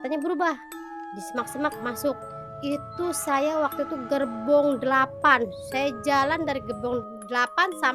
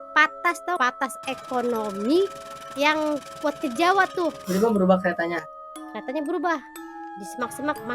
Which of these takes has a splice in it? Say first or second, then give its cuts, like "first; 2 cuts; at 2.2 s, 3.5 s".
second; 2 cuts; at 0.8 s, 4.5 s